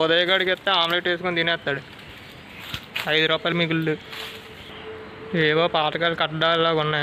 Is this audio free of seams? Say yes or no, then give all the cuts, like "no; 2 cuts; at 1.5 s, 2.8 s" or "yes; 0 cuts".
yes; 0 cuts